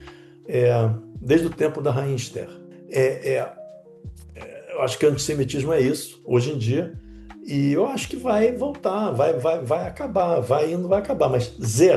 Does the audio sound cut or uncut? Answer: cut